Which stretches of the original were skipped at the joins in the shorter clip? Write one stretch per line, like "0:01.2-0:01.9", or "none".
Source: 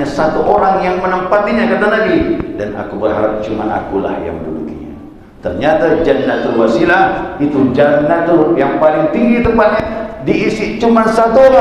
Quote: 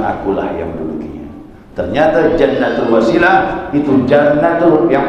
none